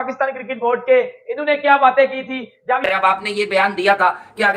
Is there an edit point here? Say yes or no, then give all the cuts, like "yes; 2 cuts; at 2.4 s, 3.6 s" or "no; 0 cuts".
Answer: yes; 1 cut; at 2.8 s